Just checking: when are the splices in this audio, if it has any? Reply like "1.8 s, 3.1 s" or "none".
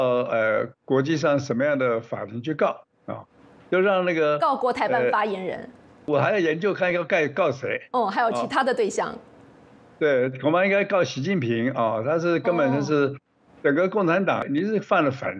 6.1 s, 14.4 s